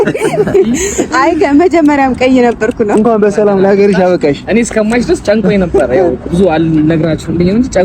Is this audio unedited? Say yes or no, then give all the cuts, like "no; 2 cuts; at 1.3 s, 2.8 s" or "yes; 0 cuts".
no; 1 cut; at 3.0 s